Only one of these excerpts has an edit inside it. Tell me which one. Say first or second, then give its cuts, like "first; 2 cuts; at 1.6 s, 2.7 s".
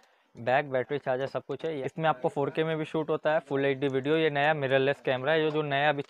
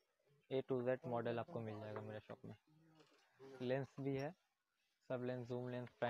first; 1 cut; at 1.8 s